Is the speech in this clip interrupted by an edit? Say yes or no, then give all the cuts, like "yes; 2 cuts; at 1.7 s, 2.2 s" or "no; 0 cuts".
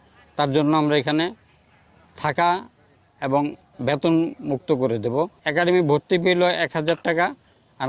yes; 1 cut; at 5.4 s